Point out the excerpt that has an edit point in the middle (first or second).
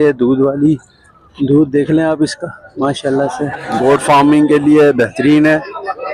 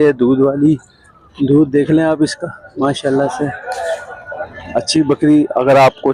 first